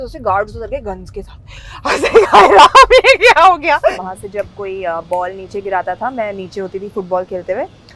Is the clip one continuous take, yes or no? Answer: no